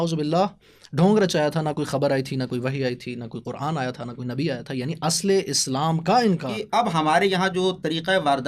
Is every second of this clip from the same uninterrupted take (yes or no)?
no